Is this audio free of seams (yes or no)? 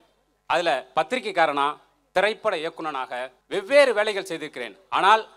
no